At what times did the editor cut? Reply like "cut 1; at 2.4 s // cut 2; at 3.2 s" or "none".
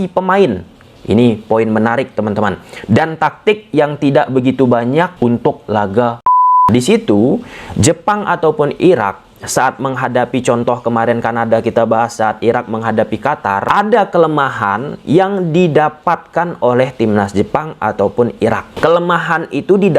cut 1; at 5.1 s // cut 2; at 6.6 s // cut 3; at 13.7 s // cut 4; at 18.7 s